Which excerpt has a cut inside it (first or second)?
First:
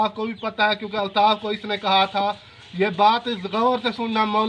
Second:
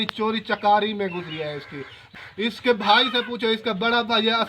second